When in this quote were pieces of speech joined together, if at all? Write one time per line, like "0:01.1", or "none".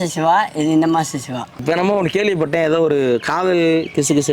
0:01.6